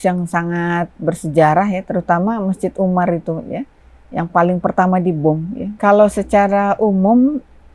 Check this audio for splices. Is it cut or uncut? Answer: cut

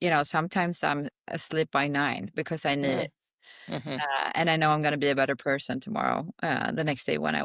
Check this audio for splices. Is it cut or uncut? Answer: uncut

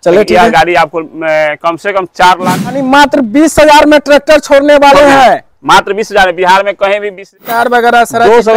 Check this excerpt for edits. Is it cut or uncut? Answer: cut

